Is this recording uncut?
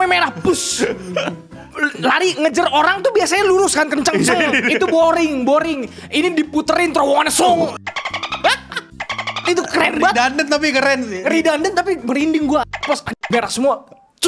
yes; 0 cuts

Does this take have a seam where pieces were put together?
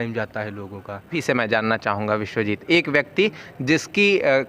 yes; 1 cut; at 1.2 s

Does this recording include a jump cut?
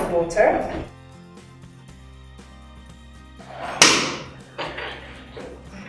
yes; 2 cuts; at 0.9 s, 3.5 s

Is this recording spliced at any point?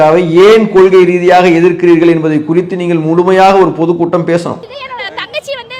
yes; 1 cut; at 4.8 s

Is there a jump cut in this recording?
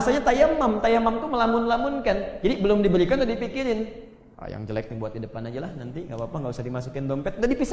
no; 0 cuts

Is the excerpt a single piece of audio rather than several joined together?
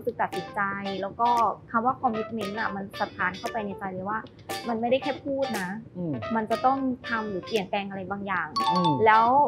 yes; 0 cuts

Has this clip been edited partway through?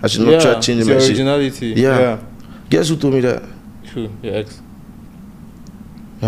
yes; 1 cut; at 3.6 s

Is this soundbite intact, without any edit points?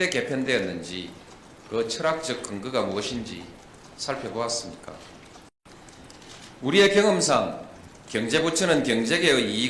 no; 1 cut; at 5.6 s

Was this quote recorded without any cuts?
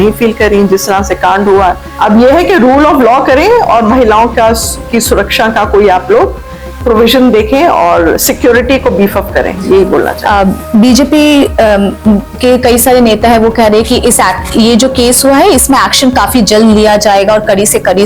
yes; 0 cuts

